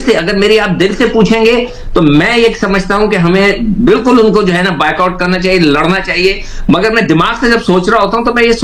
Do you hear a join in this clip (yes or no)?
no